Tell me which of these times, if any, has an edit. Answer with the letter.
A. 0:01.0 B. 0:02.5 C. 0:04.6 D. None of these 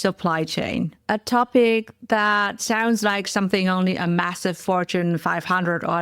A